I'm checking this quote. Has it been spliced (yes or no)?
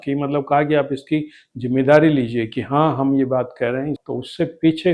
yes